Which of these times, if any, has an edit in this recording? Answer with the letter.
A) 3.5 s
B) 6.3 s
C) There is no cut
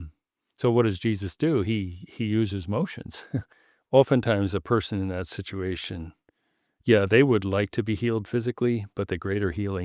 A